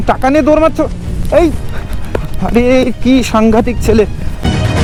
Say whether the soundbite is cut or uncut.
uncut